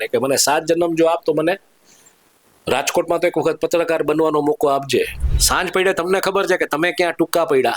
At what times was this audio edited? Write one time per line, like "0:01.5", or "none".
0:05.2